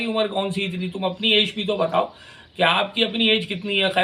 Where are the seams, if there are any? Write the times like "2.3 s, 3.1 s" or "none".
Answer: none